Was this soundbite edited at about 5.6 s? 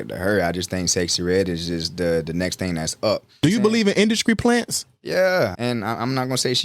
yes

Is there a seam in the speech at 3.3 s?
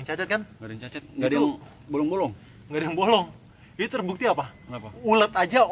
no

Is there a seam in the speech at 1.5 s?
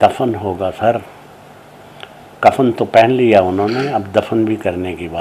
no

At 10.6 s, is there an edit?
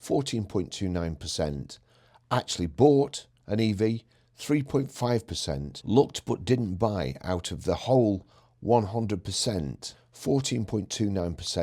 no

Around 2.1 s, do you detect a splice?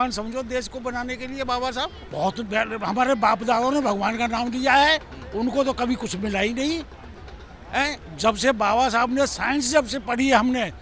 yes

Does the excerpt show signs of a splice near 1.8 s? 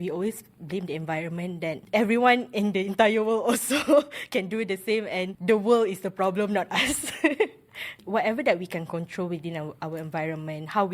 yes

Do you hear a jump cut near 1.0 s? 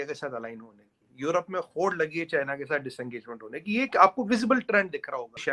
no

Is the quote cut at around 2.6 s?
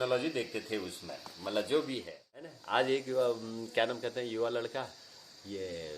yes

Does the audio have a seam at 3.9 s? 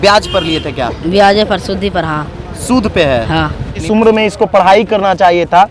yes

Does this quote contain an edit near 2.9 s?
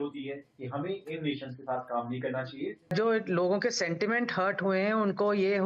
yes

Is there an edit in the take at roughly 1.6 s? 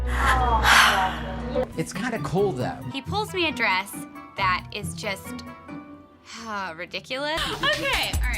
yes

